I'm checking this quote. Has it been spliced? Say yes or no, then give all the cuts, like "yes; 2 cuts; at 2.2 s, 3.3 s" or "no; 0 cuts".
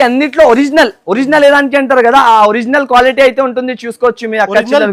no; 0 cuts